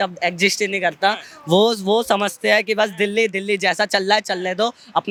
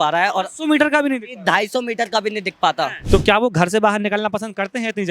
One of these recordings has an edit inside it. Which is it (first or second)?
second